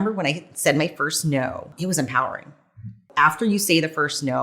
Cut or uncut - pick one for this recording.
cut